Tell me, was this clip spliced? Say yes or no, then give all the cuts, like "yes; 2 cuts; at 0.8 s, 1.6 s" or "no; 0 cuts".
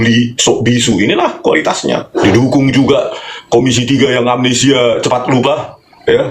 yes; 1 cut; at 2.2 s